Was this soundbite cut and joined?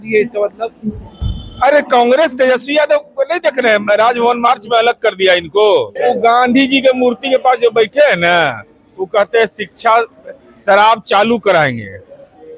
yes; 1 cut; at 5.9 s

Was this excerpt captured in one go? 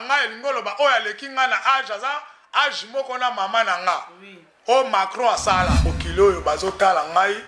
no; 1 cut; at 6.0 s

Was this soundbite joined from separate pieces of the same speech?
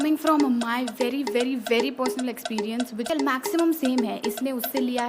yes; 1 cut; at 3.1 s

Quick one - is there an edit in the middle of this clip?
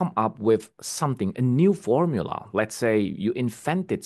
no; 0 cuts

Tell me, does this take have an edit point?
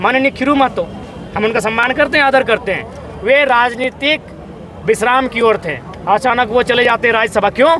no; 0 cuts

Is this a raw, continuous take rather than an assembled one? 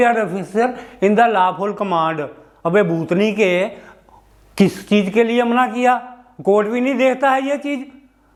yes; 0 cuts

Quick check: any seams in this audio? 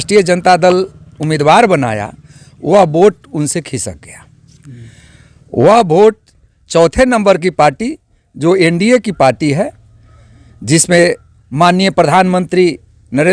no; 0 cuts

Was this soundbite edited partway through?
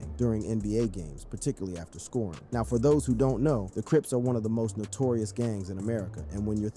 no; 0 cuts

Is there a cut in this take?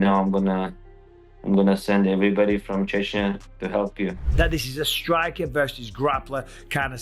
yes; 1 cut; at 4.2 s

